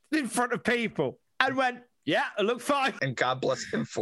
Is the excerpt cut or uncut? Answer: cut